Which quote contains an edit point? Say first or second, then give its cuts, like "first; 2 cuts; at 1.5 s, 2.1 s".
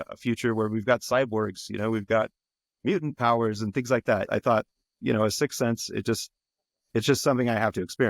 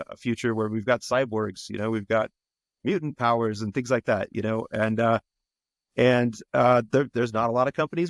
first; 1 cut; at 4.3 s